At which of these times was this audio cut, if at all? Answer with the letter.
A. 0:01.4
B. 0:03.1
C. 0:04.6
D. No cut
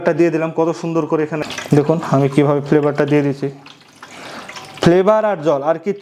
A